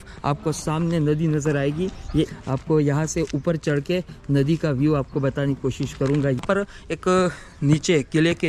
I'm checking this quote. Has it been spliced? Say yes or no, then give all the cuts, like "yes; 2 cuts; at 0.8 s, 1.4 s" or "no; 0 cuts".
yes; 2 cuts; at 2.3 s, 6.4 s